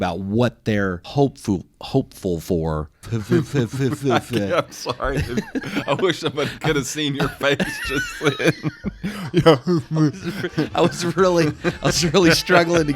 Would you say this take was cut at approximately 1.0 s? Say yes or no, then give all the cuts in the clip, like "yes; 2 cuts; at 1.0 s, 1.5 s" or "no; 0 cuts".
yes; 2 cuts; at 1.0 s, 3.0 s